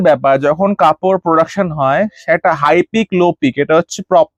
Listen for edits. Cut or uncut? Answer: uncut